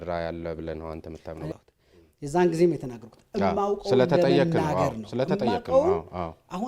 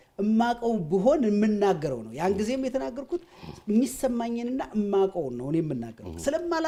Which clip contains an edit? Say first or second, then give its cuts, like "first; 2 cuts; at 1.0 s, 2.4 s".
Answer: first; 1 cut; at 1.5 s